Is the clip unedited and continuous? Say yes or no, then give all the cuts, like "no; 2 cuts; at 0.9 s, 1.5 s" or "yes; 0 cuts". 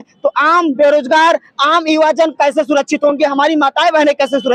yes; 0 cuts